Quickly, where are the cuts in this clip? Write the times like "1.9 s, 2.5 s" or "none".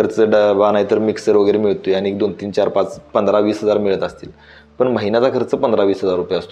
none